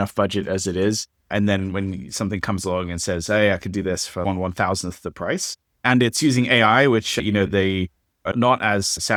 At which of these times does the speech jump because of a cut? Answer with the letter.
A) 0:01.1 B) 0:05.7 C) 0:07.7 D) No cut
D